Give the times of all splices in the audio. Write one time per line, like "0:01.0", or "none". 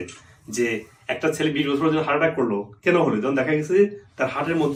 none